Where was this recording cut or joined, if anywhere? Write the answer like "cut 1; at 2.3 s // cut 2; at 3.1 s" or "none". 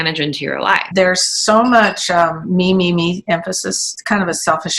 cut 1; at 0.9 s // cut 2; at 3.8 s